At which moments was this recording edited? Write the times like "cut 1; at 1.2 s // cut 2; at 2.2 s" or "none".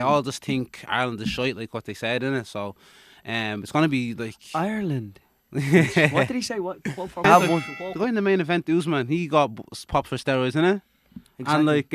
cut 1; at 7.2 s